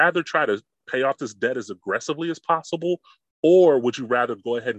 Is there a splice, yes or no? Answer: no